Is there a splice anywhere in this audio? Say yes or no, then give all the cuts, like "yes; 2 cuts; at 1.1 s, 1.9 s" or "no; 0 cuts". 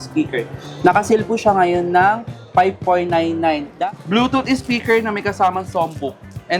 yes; 1 cut; at 3.7 s